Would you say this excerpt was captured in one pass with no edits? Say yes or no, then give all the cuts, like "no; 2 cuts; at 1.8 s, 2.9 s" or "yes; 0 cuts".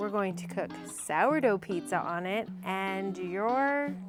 yes; 0 cuts